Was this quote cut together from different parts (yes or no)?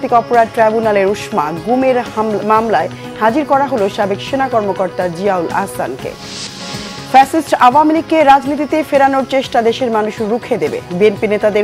no